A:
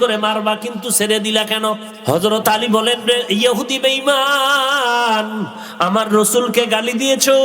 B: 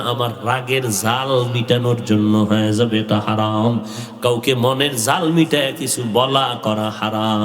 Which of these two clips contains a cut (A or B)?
A